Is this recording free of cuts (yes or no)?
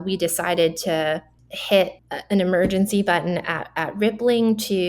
no